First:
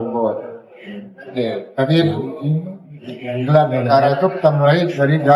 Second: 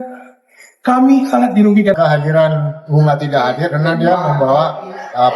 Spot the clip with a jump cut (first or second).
second